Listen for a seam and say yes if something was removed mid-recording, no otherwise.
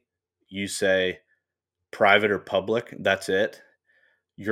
no